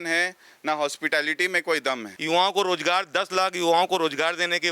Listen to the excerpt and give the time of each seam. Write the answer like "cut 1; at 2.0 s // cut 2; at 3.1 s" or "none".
cut 1; at 2.1 s